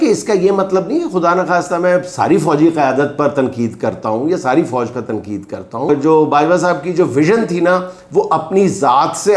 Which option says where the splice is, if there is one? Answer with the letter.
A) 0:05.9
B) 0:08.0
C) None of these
A